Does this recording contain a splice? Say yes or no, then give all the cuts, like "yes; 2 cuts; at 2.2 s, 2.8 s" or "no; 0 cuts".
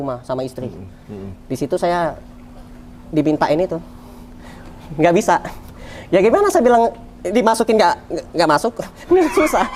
no; 0 cuts